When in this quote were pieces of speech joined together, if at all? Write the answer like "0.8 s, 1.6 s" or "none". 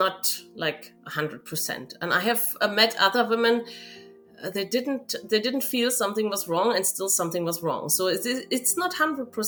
none